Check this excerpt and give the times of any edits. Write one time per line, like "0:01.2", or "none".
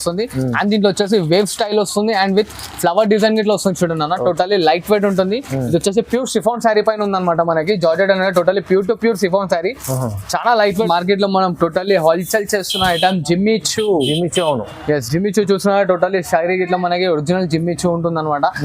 0:10.9